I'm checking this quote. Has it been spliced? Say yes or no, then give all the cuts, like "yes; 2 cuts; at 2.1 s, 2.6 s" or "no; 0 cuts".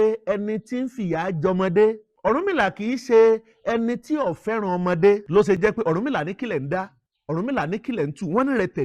yes; 1 cut; at 5.2 s